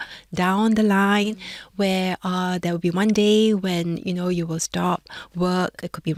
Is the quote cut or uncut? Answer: uncut